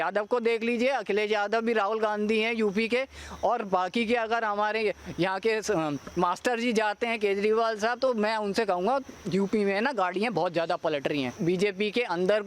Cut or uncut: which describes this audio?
cut